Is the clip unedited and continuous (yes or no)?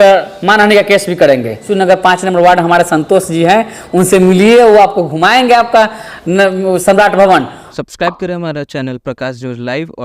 no